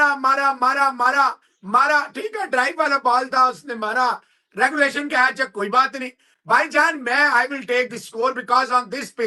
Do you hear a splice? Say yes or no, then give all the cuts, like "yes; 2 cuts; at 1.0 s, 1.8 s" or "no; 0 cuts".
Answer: no; 0 cuts